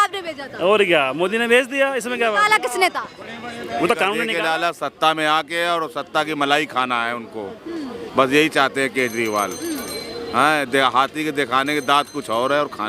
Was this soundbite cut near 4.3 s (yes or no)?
yes